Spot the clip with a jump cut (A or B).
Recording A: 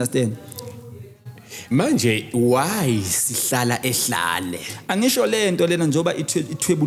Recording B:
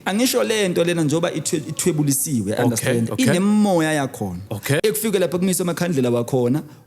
B